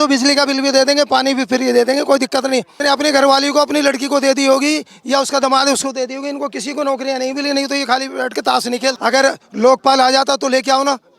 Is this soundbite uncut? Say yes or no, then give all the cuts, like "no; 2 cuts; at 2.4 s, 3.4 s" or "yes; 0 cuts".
no; 2 cuts; at 2.7 s, 9.0 s